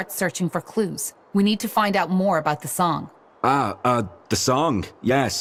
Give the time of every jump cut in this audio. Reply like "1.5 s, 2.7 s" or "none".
none